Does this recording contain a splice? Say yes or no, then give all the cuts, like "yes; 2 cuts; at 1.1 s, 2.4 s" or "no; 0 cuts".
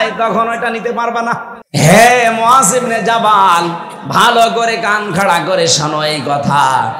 yes; 1 cut; at 1.5 s